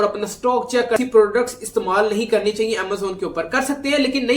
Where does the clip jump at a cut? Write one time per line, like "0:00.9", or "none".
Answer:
0:01.0

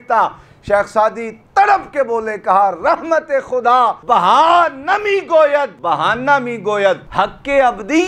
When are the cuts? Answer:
0:04.0
0:05.7
0:07.1

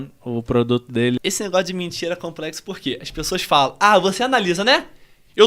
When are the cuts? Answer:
0:01.2

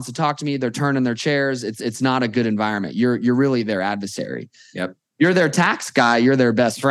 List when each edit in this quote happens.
none

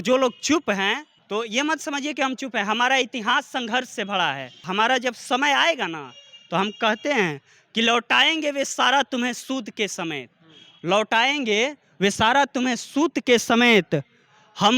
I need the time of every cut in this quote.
0:01.1
0:04.6

